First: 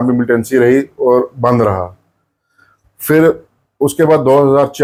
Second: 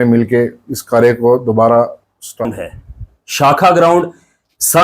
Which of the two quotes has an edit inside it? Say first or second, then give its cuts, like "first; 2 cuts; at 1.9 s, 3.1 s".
second; 1 cut; at 2.4 s